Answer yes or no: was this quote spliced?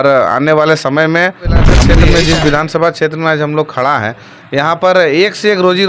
yes